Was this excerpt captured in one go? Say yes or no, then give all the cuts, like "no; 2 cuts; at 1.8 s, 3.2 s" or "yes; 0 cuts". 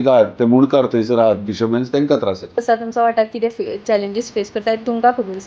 no; 1 cut; at 2.6 s